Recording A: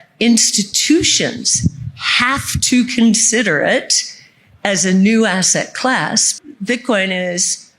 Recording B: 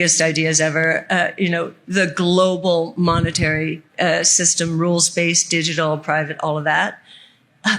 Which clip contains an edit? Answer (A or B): A